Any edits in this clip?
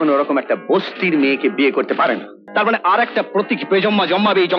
yes; 1 cut; at 2.3 s

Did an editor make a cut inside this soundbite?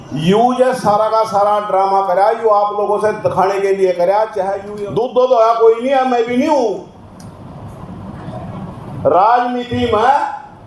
yes; 1 cut; at 4.7 s

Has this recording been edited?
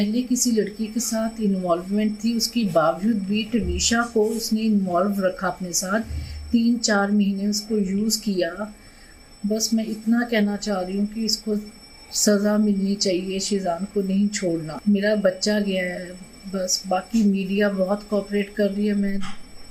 no; 0 cuts

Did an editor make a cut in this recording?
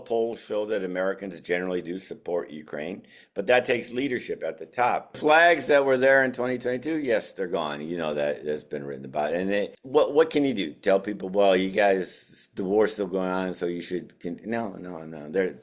yes; 2 cuts; at 5.2 s, 9.8 s

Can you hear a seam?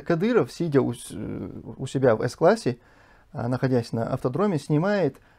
no; 0 cuts

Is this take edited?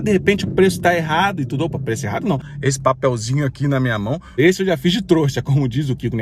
yes; 2 cuts; at 2.5 s, 4.4 s

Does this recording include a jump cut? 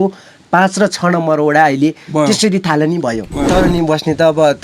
yes; 1 cut; at 3.5 s

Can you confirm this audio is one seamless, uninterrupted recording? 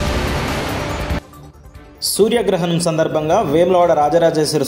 no; 1 cut; at 1.1 s

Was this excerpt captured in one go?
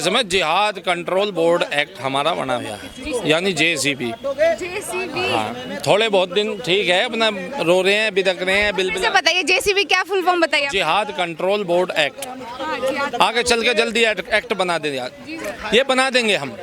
yes; 0 cuts

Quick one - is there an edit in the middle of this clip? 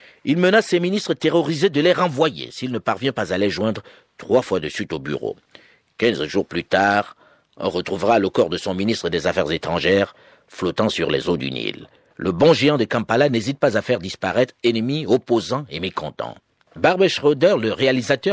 no; 0 cuts

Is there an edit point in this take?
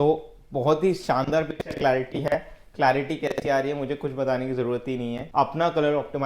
yes; 1 cut; at 5.2 s

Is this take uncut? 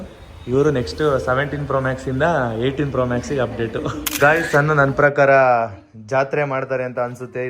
no; 1 cut; at 4.0 s

